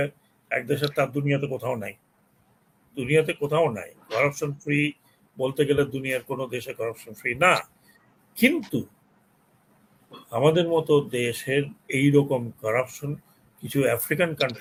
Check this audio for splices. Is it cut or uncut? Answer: uncut